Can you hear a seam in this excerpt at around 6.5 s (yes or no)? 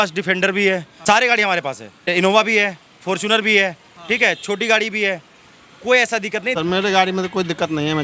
yes